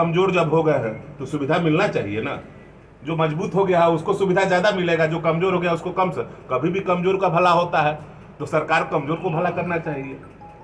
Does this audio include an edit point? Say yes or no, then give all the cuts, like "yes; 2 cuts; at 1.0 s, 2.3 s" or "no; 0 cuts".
no; 0 cuts